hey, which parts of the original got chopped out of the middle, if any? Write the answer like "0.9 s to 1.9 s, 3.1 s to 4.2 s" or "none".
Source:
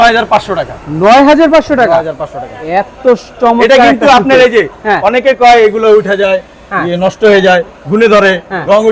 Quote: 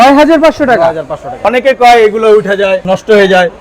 2.5 s to 5.0 s, 6.4 s to 7.0 s